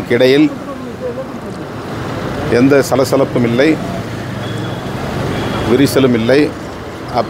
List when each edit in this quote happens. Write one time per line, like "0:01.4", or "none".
none